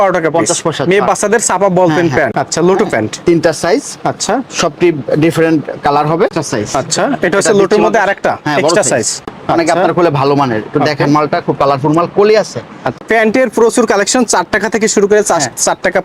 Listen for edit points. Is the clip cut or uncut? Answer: cut